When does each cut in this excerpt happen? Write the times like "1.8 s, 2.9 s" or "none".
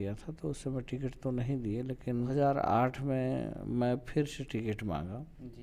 2.3 s